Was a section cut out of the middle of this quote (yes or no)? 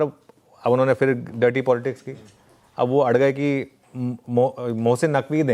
no